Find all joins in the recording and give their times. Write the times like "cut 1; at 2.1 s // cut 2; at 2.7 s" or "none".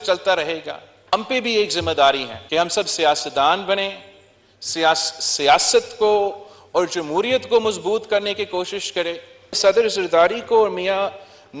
cut 1; at 1.1 s // cut 2; at 2.3 s // cut 3; at 9.6 s